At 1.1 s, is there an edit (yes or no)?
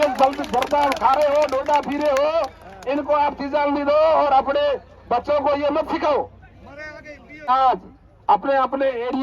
no